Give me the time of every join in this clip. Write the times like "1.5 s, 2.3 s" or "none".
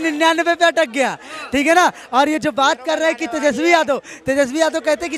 none